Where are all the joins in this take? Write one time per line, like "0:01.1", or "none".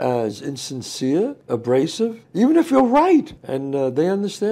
none